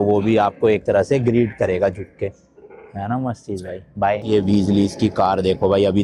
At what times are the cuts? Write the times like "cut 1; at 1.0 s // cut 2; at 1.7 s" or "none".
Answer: cut 1; at 4.2 s